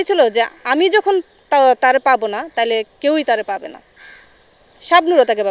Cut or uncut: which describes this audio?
uncut